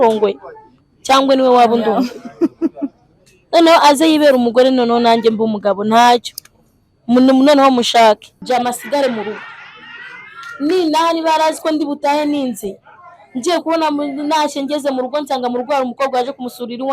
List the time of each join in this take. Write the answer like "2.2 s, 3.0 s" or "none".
8.3 s